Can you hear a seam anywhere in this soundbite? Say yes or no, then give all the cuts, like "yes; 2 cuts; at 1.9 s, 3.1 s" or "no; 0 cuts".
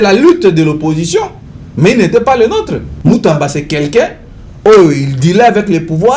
yes; 1 cut; at 2.8 s